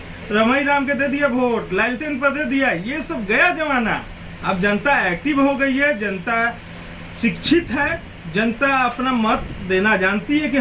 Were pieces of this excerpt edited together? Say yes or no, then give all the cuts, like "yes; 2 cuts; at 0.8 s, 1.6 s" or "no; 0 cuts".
no; 0 cuts